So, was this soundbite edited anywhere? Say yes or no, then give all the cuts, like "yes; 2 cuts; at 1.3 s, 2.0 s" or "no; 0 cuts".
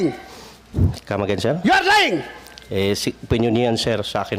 no; 0 cuts